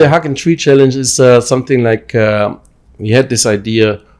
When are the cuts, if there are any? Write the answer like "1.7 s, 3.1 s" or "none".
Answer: none